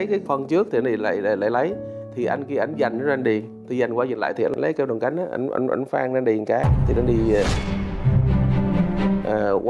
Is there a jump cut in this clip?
no; 0 cuts

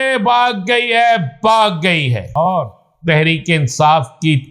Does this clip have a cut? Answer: yes; 1 cut; at 2.4 s

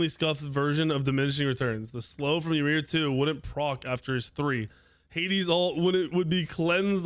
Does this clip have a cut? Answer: no; 0 cuts

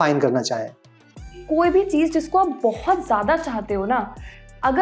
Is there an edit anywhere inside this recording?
yes; 1 cut; at 1.4 s

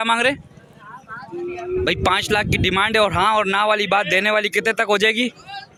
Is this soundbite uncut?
yes; 0 cuts

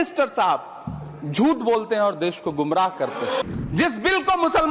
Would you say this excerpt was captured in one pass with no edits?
no; 1 cut; at 3.4 s

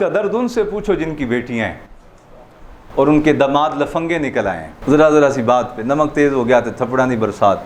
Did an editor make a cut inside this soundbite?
no; 0 cuts

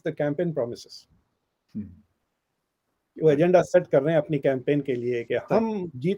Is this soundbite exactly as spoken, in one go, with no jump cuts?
yes; 0 cuts

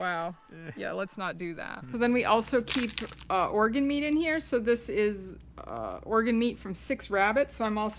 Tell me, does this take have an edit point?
yes; 1 cut; at 1.9 s

